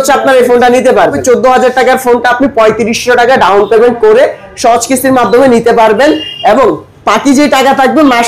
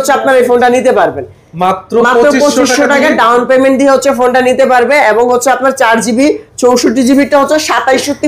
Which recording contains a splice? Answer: first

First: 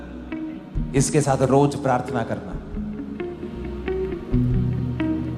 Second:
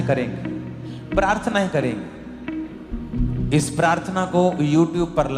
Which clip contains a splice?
second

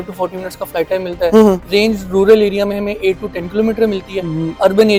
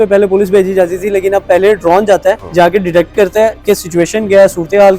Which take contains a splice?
second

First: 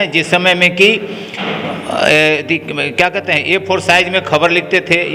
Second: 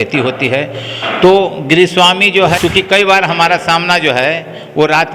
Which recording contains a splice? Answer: second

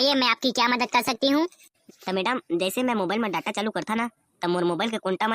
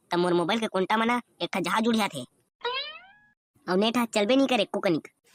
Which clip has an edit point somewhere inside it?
first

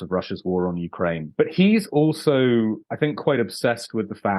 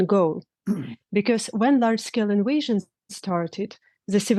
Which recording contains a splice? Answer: first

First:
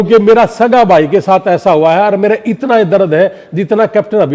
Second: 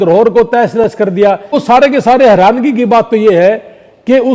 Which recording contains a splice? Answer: second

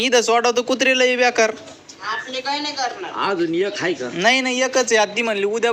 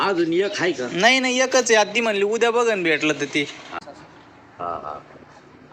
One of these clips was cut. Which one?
second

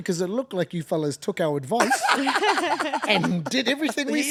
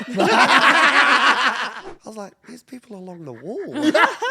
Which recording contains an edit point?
second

